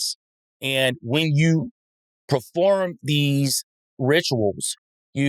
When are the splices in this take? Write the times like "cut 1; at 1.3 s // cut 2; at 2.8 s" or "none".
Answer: cut 1; at 3.9 s